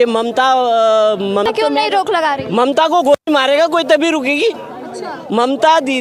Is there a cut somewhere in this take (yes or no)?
yes